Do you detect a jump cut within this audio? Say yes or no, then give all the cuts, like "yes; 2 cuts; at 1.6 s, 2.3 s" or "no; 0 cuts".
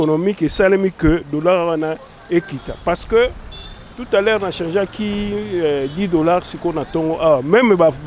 no; 0 cuts